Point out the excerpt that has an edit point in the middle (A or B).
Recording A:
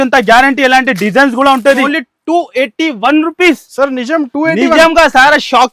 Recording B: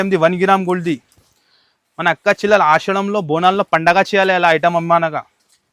A